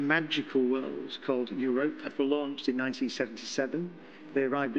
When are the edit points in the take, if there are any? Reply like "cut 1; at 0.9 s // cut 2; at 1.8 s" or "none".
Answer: cut 1; at 2.1 s